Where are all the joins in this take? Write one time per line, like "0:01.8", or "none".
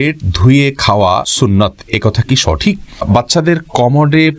0:01.3
0:03.1